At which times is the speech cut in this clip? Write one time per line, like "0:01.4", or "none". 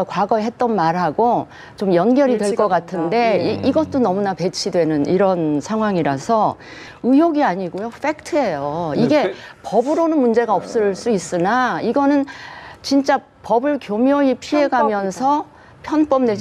0:06.9